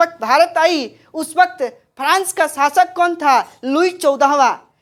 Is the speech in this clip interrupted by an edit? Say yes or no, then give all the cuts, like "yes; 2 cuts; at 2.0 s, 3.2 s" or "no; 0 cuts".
no; 0 cuts